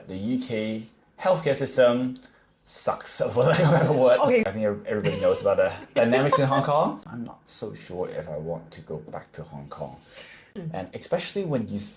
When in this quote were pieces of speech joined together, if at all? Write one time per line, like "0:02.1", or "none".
0:04.5
0:07.0
0:10.4